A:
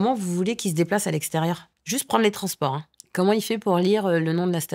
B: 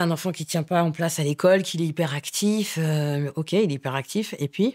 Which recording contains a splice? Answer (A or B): A